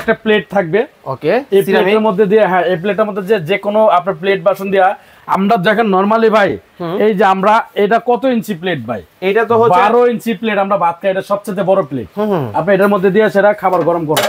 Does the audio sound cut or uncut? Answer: uncut